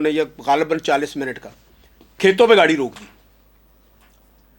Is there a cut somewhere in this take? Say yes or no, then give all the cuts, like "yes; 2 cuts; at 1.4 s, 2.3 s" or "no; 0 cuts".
no; 0 cuts